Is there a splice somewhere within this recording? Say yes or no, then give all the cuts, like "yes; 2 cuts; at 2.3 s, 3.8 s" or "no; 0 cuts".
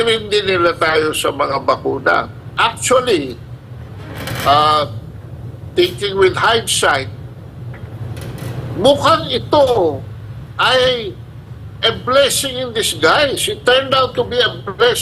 yes; 1 cut; at 2.4 s